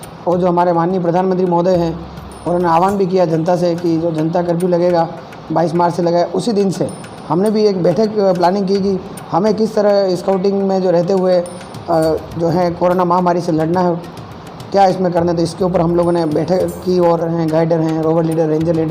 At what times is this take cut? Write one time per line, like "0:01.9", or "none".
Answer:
0:17.2

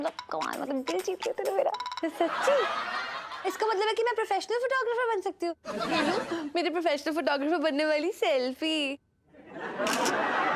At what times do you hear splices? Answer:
none

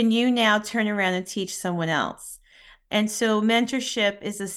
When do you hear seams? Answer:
none

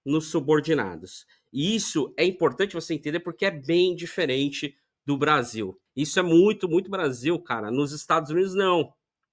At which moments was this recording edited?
0:05.8

